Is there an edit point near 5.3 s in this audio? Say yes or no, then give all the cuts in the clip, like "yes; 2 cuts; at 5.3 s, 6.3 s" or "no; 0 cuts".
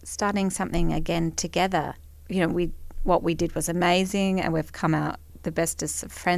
yes; 2 cuts; at 2.0 s, 5.3 s